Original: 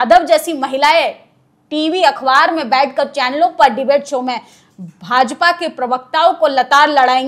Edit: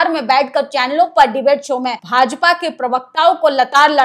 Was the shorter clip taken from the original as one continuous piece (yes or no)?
no